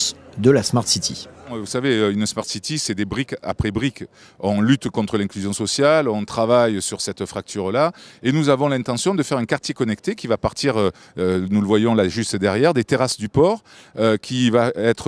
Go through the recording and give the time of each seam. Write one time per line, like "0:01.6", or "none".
0:09.0